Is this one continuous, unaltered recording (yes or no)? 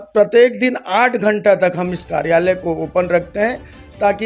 yes